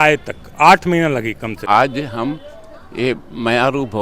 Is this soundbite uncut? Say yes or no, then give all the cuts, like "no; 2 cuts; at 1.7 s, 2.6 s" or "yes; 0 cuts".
no; 1 cut; at 1.5 s